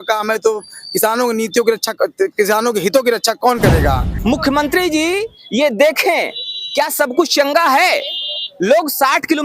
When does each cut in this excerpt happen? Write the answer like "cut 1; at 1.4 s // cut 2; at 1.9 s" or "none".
cut 1; at 4.1 s